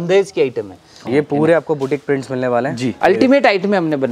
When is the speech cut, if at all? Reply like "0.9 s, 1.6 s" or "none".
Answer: 1.0 s, 2.9 s